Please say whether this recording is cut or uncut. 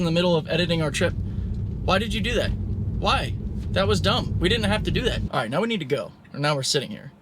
cut